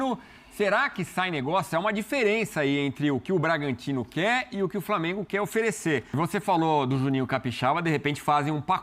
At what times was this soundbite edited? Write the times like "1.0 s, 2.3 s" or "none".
6.1 s